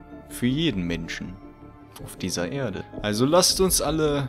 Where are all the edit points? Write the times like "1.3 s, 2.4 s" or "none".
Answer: 2.9 s